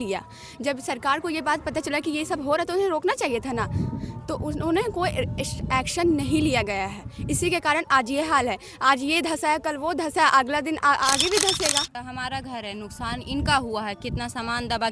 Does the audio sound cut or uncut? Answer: cut